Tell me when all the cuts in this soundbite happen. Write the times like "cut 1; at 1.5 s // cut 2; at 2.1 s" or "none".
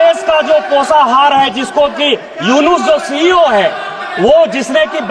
none